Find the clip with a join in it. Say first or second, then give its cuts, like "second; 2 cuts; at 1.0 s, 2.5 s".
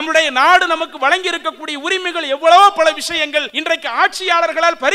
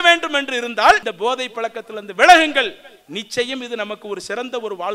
first; 1 cut; at 3.5 s